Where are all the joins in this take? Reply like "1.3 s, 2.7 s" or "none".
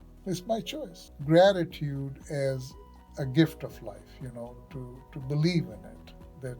1.1 s